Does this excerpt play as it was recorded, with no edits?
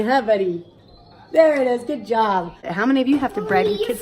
no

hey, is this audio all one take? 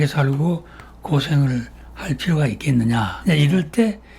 no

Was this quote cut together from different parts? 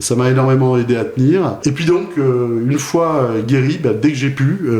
yes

